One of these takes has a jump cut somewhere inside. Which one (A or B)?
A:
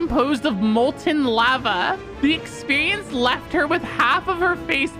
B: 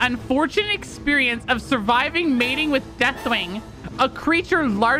A